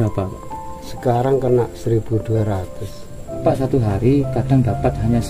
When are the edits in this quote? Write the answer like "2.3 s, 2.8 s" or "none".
3.4 s